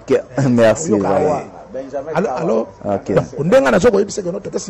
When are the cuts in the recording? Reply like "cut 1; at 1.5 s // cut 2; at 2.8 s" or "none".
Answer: none